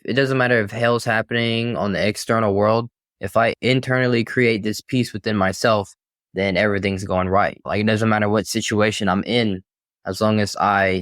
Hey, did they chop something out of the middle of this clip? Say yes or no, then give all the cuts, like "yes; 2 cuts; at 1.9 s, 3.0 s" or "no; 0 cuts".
yes; 1 cut; at 7.6 s